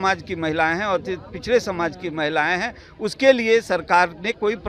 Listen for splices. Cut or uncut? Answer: uncut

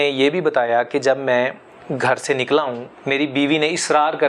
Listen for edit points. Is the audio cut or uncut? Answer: cut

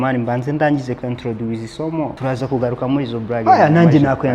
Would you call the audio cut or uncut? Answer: cut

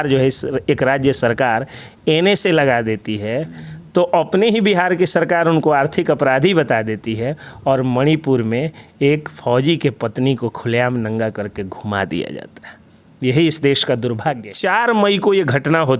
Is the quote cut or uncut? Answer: cut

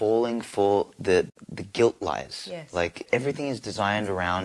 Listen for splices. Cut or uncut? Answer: cut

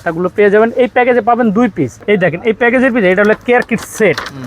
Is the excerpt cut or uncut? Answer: cut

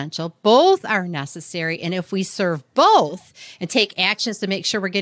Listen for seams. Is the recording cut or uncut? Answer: uncut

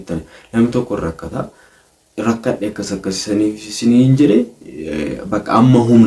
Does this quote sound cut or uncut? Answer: uncut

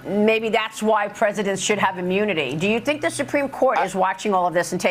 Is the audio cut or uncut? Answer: uncut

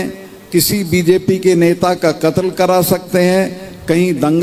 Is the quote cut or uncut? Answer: uncut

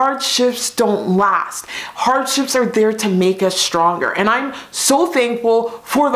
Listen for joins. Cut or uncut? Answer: uncut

